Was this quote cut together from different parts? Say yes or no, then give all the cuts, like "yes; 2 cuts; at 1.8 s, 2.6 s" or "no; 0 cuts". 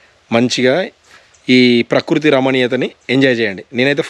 no; 0 cuts